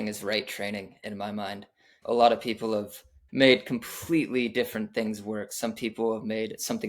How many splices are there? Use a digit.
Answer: 2